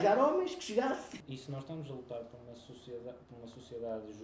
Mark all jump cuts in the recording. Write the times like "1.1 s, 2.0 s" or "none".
1.2 s